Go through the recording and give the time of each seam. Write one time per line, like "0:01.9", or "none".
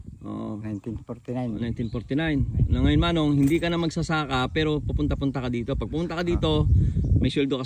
none